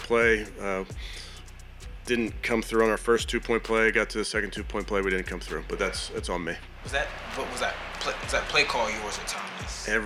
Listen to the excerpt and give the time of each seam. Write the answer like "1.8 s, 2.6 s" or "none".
none